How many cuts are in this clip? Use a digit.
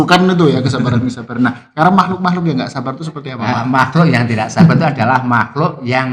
0